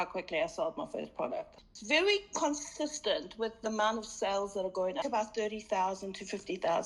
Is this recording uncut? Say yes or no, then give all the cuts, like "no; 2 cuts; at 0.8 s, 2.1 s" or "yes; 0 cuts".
no; 2 cuts; at 1.5 s, 5.0 s